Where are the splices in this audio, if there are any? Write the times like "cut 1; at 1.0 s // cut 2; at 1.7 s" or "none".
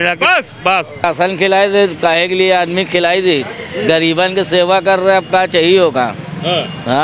cut 1; at 0.9 s

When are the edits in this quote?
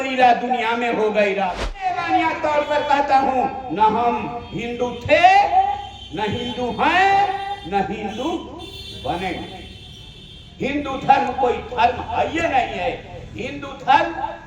cut 1; at 2.0 s

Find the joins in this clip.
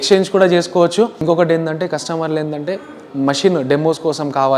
cut 1; at 1.2 s

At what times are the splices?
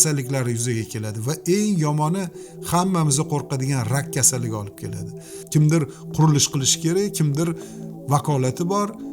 cut 1; at 5.3 s

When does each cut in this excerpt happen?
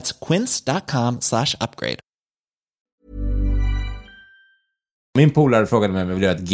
cut 1; at 2.8 s // cut 2; at 5.1 s

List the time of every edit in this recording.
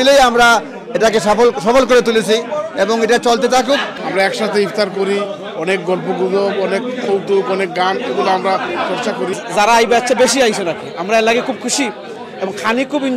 cut 1; at 3.9 s // cut 2; at 9.3 s

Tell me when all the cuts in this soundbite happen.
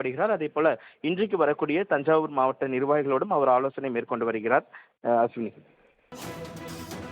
cut 1; at 6.2 s

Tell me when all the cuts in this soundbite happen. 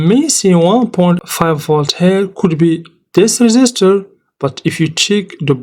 cut 1; at 1.2 s

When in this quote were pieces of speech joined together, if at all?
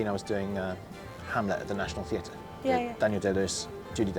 cut 1; at 1.2 s

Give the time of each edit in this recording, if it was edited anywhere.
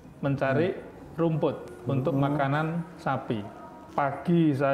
cut 1; at 3.7 s

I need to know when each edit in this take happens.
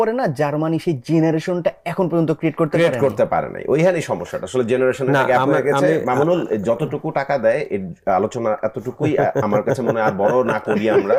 none

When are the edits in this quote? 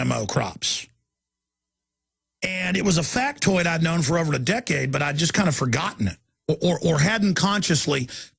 none

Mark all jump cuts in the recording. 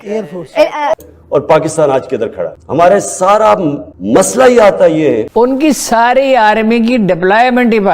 cut 1; at 1.0 s // cut 2; at 5.3 s

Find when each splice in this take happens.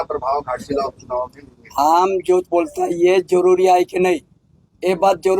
none

